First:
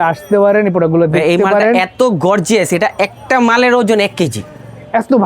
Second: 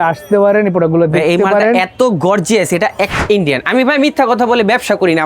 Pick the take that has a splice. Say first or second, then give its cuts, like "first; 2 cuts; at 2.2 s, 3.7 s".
second; 1 cut; at 3.2 s